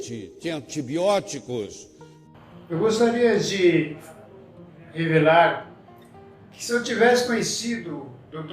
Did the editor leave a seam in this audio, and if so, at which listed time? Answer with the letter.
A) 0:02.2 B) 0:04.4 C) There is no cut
A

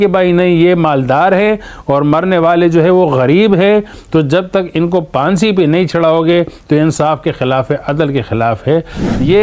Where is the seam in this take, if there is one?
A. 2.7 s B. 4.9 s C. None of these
C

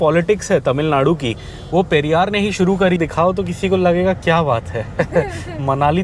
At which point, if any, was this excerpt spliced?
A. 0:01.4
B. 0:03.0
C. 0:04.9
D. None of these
B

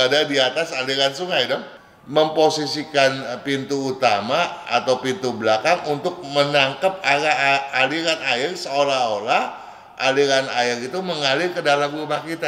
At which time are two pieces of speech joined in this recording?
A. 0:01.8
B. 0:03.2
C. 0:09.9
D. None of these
A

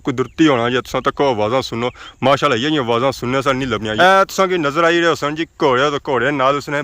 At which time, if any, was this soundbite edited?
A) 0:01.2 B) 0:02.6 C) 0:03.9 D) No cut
C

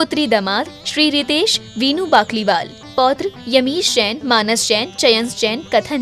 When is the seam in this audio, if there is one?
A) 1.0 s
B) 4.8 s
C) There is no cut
C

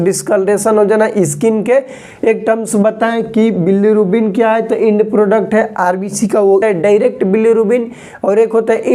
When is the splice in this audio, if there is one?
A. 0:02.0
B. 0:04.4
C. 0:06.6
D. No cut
C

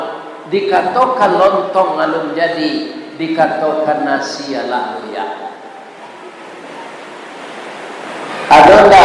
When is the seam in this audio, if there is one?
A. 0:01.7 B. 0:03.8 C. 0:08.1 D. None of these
C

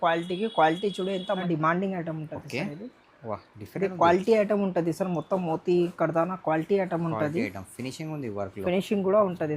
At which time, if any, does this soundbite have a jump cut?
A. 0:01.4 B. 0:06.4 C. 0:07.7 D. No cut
A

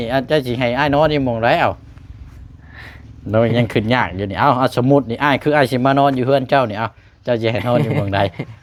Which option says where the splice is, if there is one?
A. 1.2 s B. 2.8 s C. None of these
C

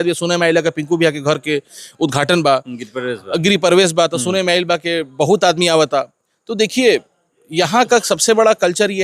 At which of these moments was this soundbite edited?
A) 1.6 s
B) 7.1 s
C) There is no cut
C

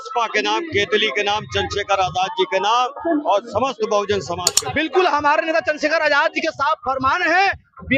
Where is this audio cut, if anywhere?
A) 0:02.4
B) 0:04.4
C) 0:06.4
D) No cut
B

